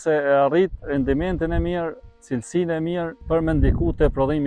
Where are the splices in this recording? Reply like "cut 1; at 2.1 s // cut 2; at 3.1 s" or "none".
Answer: cut 1; at 3.2 s